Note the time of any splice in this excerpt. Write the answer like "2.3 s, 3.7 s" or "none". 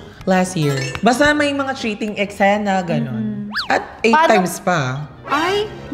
0.9 s, 3.5 s

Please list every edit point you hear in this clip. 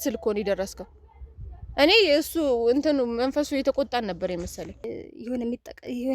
5.0 s

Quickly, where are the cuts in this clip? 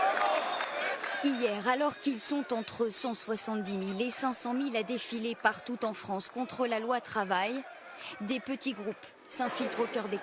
7.2 s

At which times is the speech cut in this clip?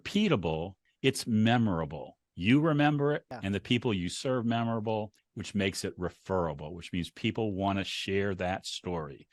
none

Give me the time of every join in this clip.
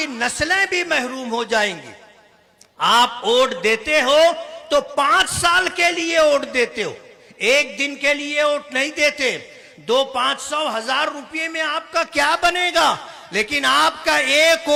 none

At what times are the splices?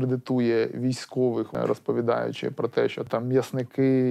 1.5 s, 3.1 s

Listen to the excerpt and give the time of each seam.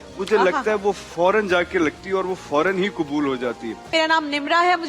3.9 s

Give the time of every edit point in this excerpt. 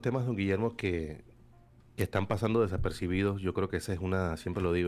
none

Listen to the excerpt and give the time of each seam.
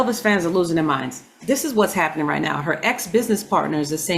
1.3 s

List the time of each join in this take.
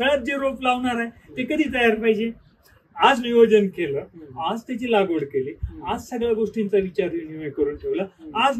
none

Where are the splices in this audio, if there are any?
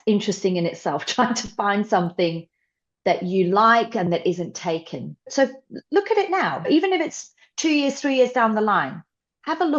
none

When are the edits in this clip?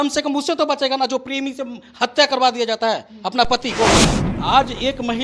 4.0 s

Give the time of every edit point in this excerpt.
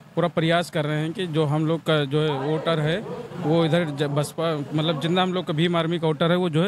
none

